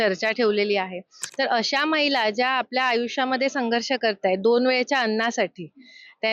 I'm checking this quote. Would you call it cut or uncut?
cut